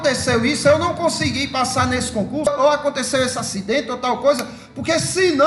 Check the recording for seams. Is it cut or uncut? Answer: cut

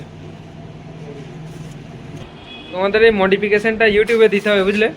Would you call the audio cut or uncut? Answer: cut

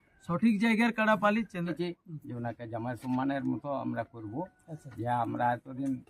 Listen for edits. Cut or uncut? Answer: cut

